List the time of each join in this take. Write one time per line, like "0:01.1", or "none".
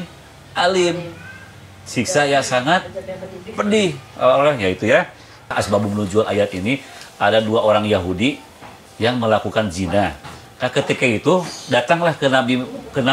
0:05.5